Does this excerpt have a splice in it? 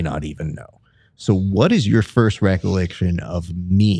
no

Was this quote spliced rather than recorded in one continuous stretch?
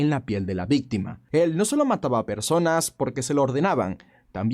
yes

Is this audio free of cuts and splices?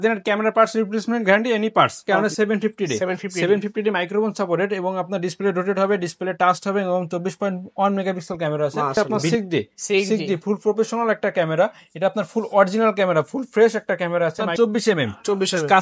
no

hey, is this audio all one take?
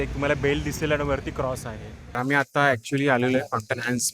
no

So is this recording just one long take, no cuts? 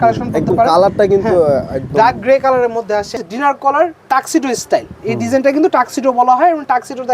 no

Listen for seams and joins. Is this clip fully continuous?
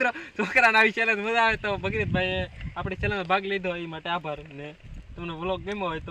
yes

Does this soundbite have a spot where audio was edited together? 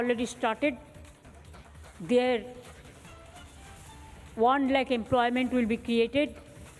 yes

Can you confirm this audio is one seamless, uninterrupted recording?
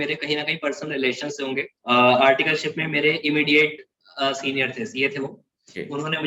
no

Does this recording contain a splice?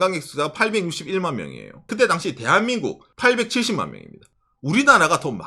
yes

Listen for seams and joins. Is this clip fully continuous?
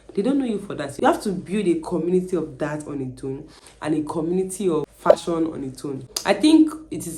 no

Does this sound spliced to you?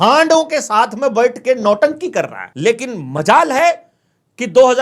yes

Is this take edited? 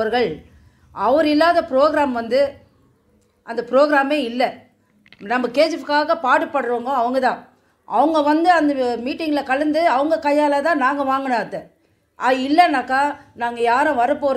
no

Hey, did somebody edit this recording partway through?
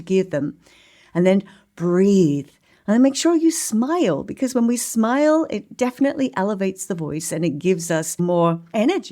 yes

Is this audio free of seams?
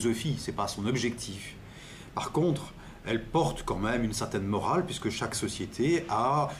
no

